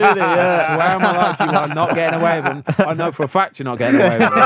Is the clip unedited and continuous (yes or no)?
yes